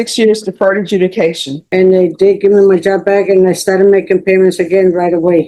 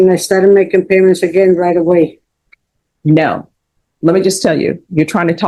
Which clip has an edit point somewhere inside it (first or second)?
first